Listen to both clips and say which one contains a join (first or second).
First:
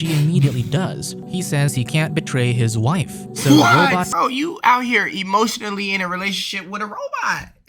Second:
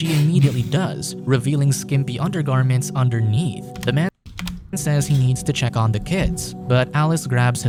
first